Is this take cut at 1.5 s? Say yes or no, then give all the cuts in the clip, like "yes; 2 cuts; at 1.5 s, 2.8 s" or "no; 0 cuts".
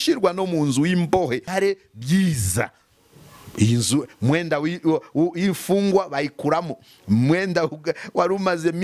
yes; 1 cut; at 1.5 s